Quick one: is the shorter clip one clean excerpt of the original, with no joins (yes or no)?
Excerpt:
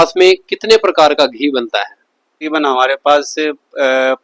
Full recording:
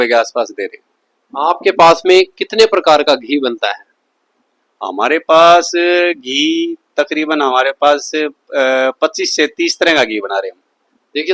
no